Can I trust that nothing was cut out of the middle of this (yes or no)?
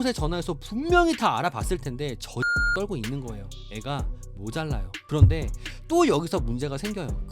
no